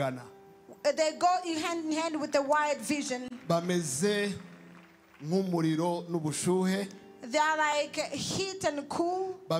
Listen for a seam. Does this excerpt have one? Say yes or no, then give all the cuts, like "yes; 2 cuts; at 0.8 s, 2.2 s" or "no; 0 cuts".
no; 0 cuts